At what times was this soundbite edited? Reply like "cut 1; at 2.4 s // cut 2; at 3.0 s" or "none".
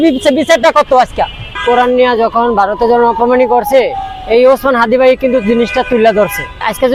none